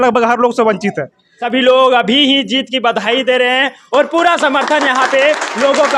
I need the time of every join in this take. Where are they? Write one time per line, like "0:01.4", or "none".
0:01.3